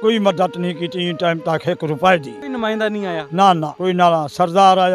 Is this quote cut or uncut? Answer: uncut